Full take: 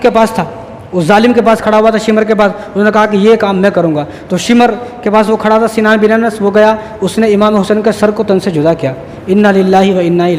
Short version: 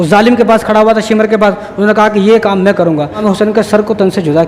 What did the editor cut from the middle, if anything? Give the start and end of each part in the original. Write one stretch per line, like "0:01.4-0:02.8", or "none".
0:04.2-0:07.5